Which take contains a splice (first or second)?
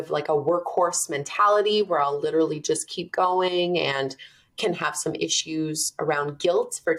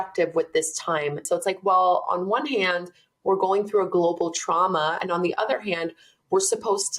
second